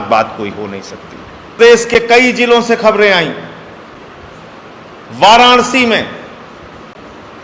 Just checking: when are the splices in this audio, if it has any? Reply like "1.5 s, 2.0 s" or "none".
1.5 s